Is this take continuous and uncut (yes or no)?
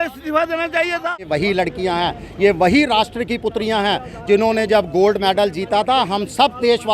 no